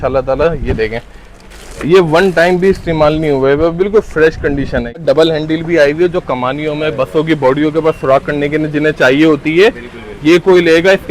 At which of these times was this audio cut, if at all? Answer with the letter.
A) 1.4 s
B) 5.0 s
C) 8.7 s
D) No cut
B